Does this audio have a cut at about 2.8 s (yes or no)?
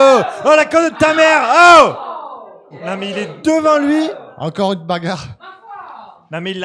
yes